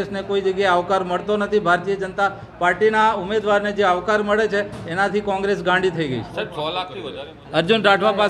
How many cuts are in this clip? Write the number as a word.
one